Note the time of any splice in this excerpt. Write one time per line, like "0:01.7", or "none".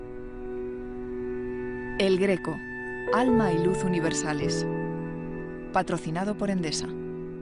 none